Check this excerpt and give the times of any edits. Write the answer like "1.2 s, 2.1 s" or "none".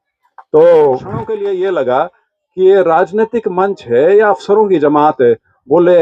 1.2 s

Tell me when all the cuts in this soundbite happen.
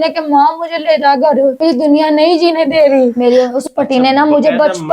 3.2 s

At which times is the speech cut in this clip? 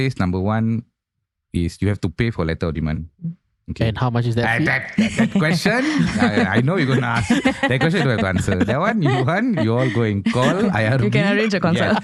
none

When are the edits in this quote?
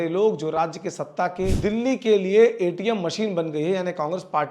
1.5 s

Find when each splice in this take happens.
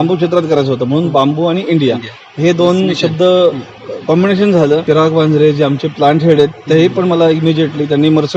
4.8 s

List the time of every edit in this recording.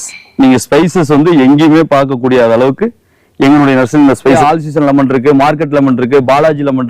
4.4 s

